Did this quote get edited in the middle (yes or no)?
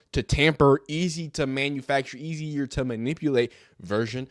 no